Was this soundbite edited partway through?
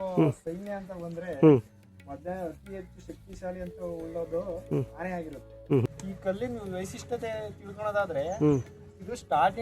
yes; 1 cut; at 5.9 s

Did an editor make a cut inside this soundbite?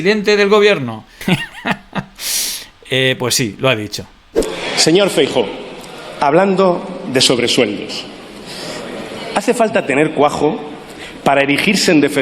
yes; 1 cut; at 4.5 s

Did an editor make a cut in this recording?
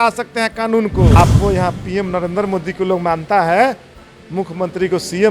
yes; 1 cut; at 1.1 s

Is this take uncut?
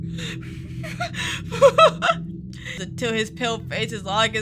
no; 1 cut; at 2.8 s

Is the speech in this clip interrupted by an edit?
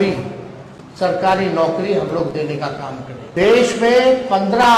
yes; 1 cut; at 3.1 s

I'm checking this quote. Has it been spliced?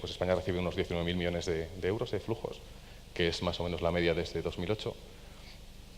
yes; 1 cut; at 2.0 s

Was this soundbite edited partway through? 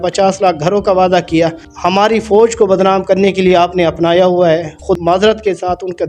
yes; 2 cuts; at 1.7 s, 5.0 s

